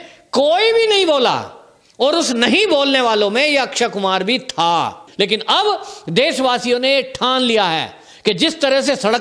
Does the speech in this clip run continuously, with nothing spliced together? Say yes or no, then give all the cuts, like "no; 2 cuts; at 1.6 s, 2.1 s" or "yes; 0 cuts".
no; 1 cut; at 5.0 s